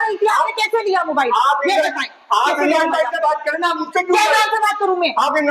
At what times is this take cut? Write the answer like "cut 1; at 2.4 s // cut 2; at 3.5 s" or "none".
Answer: none